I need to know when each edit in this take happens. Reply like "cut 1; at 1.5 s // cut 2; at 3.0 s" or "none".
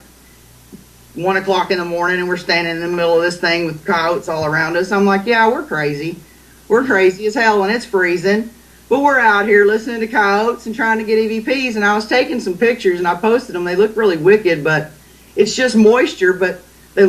cut 1; at 7.3 s

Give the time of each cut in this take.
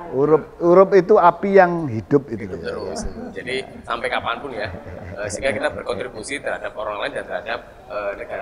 none

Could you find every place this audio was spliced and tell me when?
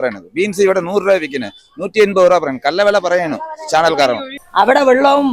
cut 1; at 4.3 s

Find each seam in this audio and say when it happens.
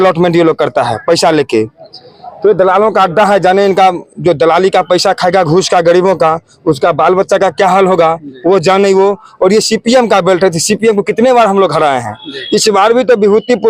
none

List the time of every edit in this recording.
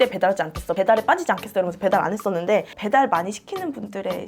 cut 1; at 2.7 s

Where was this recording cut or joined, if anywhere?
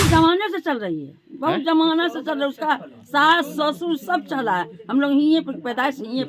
none

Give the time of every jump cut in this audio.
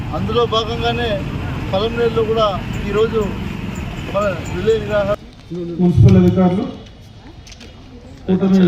cut 1; at 5.2 s

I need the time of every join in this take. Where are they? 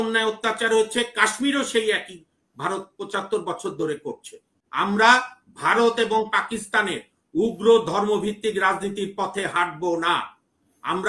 cut 1; at 4.6 s

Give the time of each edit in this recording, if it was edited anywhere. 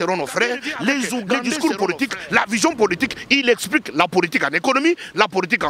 cut 1; at 1.5 s

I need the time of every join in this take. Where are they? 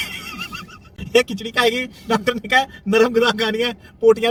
none

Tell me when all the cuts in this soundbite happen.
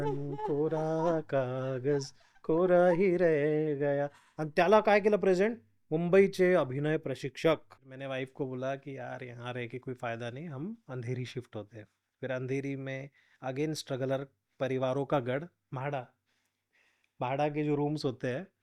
cut 1; at 7.7 s

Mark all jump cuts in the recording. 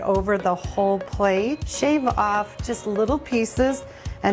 cut 1; at 1.7 s

